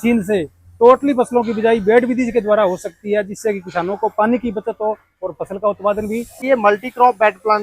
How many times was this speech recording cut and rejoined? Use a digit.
1